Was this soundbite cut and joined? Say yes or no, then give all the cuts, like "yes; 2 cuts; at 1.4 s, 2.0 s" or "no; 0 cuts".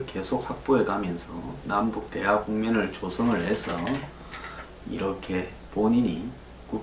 no; 0 cuts